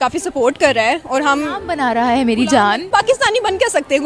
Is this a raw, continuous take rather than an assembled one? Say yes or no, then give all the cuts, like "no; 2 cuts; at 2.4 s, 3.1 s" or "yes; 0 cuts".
no; 1 cut; at 2.8 s